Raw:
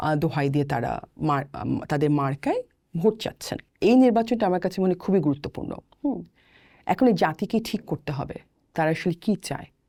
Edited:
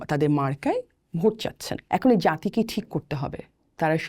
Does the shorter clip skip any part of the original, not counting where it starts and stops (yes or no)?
yes